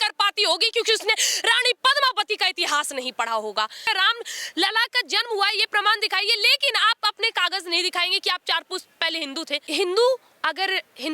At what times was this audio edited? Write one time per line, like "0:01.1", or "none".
0:03.8
0:09.6